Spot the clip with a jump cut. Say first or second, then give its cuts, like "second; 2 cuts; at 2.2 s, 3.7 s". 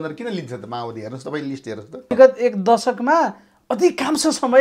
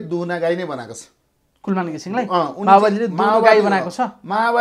first; 1 cut; at 2.1 s